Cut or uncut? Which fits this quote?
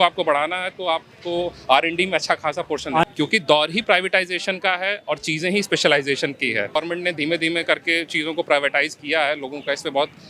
cut